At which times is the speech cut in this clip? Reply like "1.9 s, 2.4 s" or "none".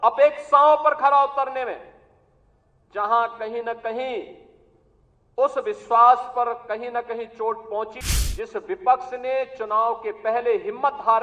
8.0 s